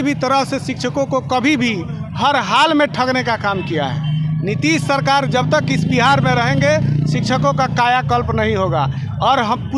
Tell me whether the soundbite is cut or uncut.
uncut